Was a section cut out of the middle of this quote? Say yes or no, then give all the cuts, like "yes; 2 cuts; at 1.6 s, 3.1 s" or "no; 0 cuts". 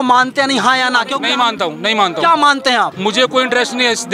yes; 2 cuts; at 1.2 s, 2.9 s